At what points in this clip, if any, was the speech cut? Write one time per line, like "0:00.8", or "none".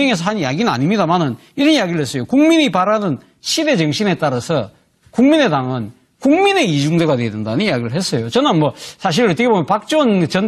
0:01.2